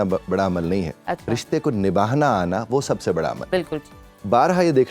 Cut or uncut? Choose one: uncut